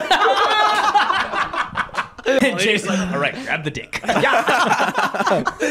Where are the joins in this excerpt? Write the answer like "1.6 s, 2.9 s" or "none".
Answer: 2.4 s